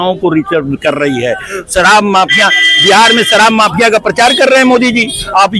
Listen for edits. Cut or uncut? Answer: uncut